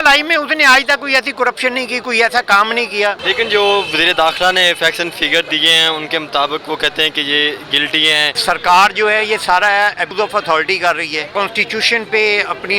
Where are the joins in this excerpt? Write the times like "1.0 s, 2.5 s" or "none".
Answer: 3.2 s, 8.4 s, 10.1 s, 11.3 s

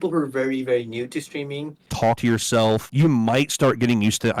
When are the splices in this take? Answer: 2.1 s

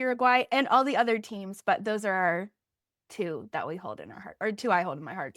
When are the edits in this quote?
none

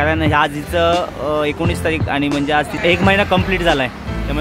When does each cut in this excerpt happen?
2.8 s

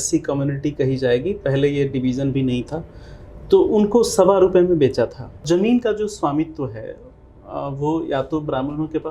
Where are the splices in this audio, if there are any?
5.5 s

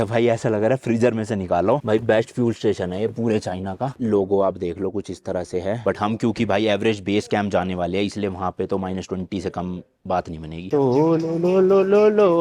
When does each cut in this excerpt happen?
1.8 s, 5.8 s, 10.6 s

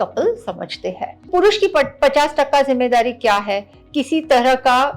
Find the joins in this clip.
1.3 s, 3.8 s

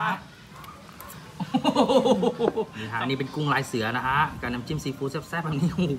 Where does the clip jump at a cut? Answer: 2.8 s

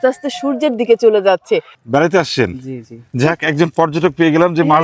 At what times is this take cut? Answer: 1.7 s

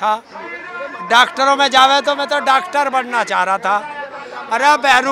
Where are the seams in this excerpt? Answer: none

